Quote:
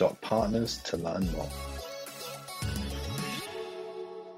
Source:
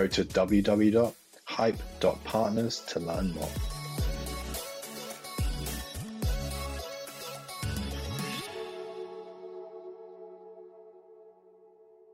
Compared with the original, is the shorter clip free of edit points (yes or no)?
no